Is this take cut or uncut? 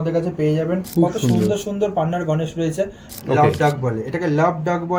cut